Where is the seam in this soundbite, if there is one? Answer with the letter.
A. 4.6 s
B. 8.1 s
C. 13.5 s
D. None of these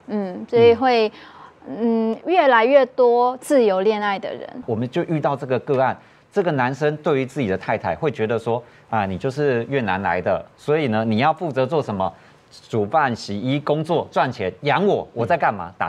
A